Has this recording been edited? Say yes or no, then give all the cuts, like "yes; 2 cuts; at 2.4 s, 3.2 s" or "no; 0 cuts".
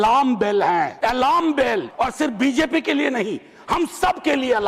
yes; 2 cuts; at 0.9 s, 1.9 s